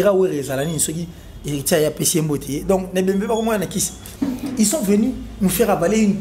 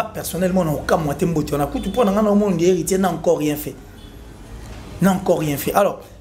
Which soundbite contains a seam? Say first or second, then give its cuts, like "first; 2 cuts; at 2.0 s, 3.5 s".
first; 1 cut; at 4.0 s